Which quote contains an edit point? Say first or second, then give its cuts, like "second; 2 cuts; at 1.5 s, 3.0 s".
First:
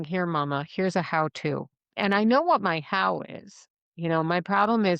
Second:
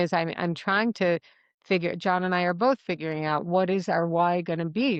first; 1 cut; at 1.8 s